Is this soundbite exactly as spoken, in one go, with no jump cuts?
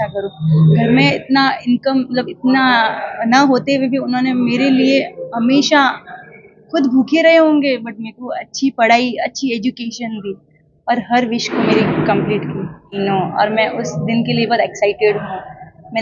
no; 1 cut; at 12.9 s

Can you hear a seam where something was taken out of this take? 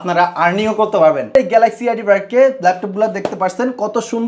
yes; 1 cut; at 1.4 s

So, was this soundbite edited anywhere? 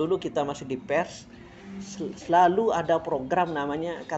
no; 0 cuts

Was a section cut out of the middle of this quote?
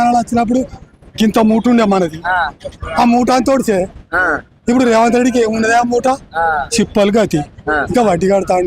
no; 0 cuts

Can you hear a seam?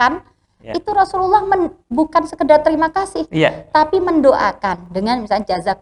no; 0 cuts

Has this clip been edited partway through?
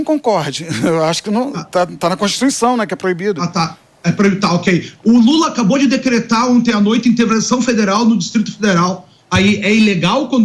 no; 0 cuts

